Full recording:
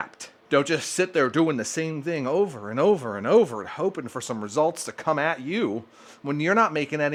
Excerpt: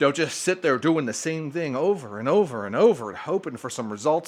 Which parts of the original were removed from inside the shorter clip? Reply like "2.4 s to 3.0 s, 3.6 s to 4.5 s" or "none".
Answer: none

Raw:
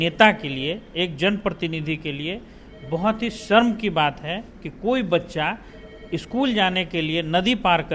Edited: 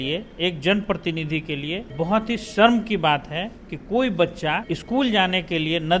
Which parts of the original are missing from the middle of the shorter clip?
2.4 s to 2.8 s, 5.6 s to 6.1 s

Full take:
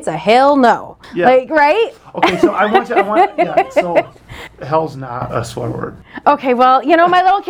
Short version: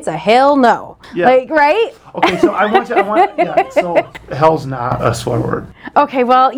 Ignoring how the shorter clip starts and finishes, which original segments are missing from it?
4.2 s to 4.5 s

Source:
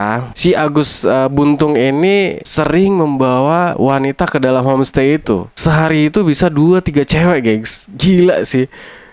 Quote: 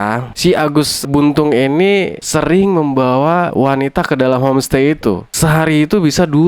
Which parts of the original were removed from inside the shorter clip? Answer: 1.0 s to 1.3 s

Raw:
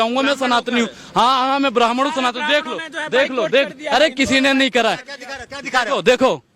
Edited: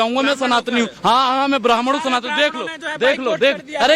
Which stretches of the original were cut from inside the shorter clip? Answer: 0.9 s to 1.1 s

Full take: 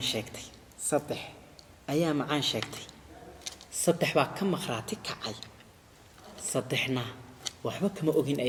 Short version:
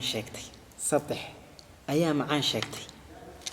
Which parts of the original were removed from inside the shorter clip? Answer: none

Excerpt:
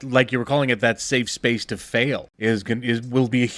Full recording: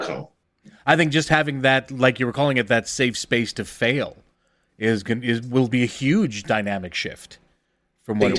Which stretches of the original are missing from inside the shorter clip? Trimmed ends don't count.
4.2 s to 4.7 s

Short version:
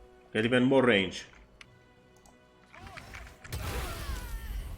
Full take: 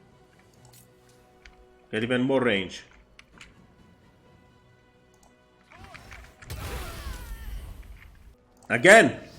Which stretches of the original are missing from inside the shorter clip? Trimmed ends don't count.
3.2 s to 4.6 s

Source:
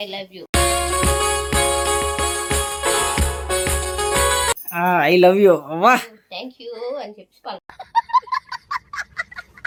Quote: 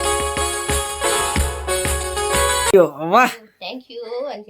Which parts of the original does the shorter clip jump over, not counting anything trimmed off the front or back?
4.5 s to 5.4 s

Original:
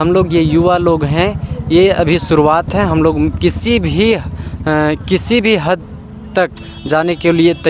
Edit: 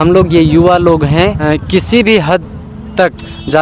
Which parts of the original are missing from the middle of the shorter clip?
1.4 s to 4.8 s

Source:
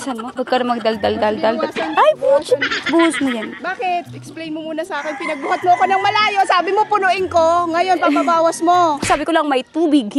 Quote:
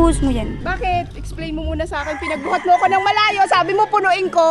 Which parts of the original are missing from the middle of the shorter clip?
none

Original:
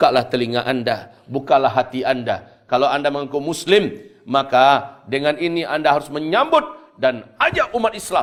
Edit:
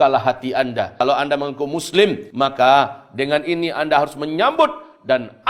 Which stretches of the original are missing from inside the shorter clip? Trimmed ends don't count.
2.4 s to 2.7 s, 4.0 s to 4.2 s

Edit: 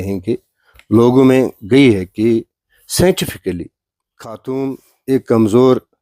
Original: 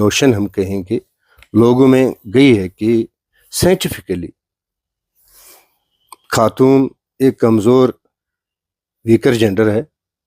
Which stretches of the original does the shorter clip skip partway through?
5.0 s to 6.5 s

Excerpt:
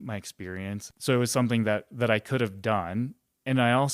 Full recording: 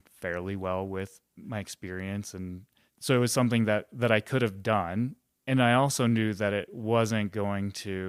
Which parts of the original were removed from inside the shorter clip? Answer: 2.3 s to 2.9 s

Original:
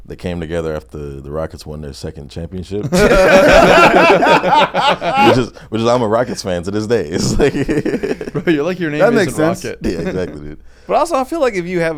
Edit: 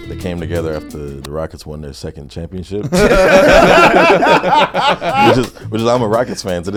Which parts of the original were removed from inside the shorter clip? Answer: none

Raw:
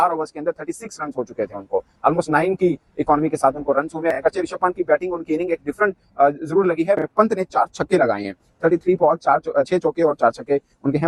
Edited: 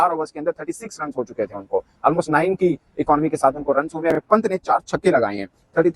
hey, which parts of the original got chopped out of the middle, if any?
4.1 s to 7.0 s

